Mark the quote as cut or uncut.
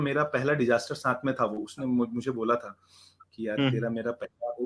uncut